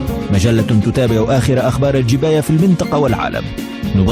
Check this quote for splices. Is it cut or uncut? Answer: uncut